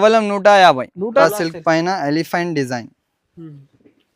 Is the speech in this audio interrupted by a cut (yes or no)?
yes